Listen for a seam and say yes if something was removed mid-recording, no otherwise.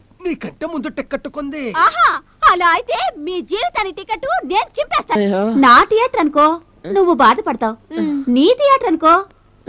yes